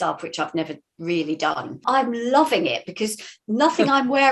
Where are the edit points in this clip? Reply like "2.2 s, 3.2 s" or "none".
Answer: 1.8 s